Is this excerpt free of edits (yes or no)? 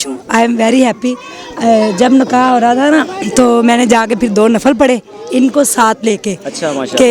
yes